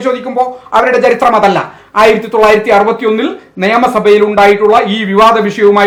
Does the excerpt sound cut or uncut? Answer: uncut